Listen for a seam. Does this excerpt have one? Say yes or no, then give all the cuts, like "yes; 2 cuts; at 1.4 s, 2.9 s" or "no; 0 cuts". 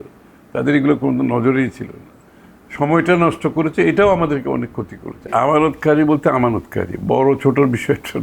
yes; 1 cut; at 5.2 s